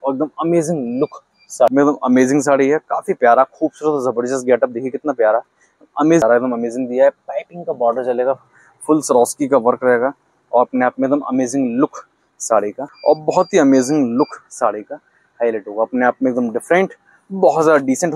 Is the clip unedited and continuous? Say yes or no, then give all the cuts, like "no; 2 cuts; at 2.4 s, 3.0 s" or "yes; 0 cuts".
no; 3 cuts; at 1.7 s, 6.2 s, 12.9 s